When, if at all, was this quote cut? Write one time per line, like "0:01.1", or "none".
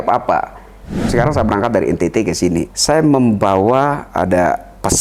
0:01.1
0:02.7
0:04.0